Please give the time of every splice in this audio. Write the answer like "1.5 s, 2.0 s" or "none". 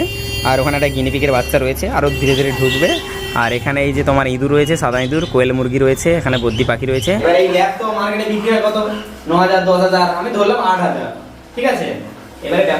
7.2 s